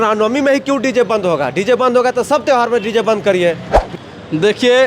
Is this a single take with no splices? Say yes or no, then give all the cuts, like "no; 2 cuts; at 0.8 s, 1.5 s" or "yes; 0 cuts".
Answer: no; 1 cut; at 3.7 s